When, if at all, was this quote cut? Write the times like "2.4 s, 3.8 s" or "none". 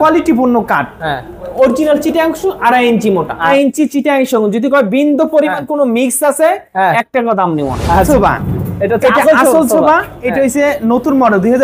3.4 s, 8.1 s